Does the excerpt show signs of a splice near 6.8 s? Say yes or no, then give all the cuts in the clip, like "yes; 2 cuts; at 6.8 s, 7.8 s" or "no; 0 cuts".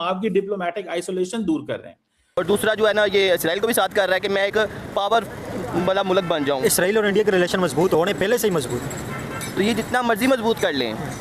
no; 1 cut; at 2.4 s